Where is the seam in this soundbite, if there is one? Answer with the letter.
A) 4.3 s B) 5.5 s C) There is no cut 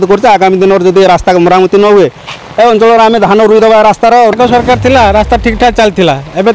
A